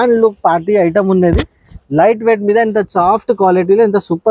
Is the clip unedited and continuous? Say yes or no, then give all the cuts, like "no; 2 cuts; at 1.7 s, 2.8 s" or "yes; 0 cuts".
yes; 0 cuts